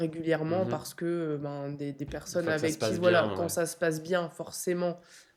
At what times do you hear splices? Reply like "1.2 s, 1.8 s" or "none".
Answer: none